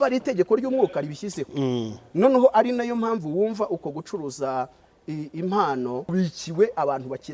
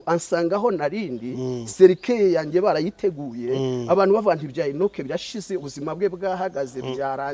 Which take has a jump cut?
first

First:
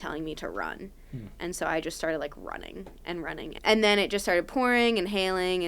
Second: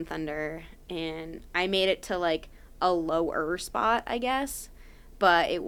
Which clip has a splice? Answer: first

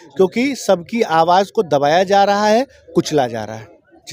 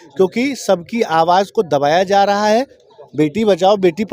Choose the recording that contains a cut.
second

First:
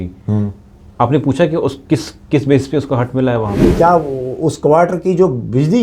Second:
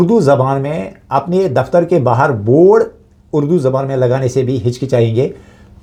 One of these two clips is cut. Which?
first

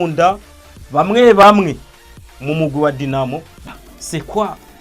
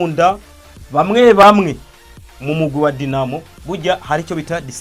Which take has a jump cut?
first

